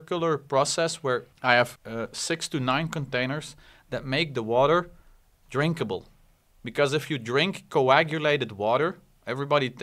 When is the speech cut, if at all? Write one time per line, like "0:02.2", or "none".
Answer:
0:01.3
0:01.8